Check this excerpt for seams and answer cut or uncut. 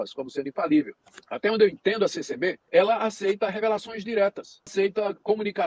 cut